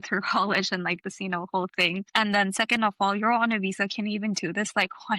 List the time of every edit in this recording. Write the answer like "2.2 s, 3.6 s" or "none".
2.1 s